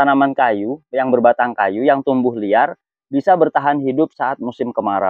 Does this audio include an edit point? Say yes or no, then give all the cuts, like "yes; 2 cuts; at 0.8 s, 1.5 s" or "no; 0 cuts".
no; 0 cuts